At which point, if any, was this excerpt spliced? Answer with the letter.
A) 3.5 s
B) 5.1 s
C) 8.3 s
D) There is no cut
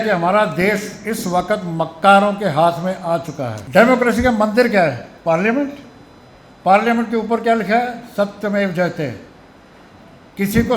A